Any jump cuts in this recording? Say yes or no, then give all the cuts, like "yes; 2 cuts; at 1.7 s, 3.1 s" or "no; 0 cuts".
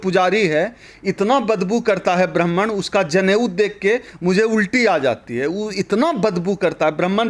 no; 0 cuts